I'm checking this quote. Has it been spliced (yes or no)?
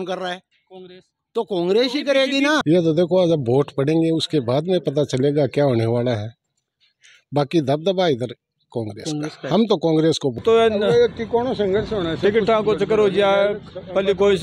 yes